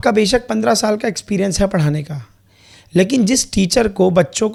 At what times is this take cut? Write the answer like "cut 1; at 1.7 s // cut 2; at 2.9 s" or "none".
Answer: none